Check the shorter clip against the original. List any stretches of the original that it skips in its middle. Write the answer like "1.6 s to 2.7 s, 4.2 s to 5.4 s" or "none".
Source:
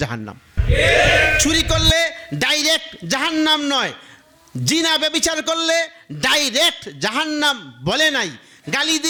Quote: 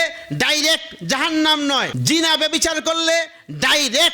3.9 s to 4.5 s